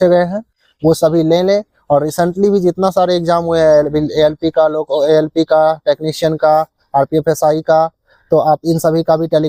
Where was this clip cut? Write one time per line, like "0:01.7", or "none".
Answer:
none

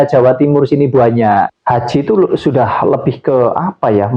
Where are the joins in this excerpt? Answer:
0:01.5

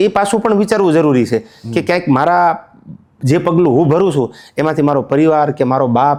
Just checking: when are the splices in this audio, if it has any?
none

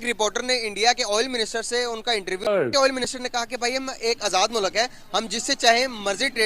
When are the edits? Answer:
0:02.5

